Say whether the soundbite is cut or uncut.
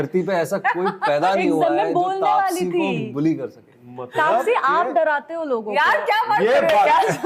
uncut